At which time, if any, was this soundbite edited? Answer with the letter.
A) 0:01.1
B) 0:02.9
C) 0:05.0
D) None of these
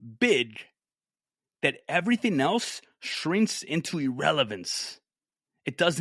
D